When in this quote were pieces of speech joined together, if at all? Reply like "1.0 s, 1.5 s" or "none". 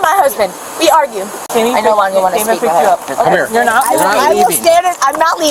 1.5 s